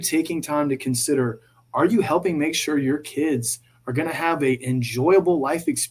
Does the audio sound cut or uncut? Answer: uncut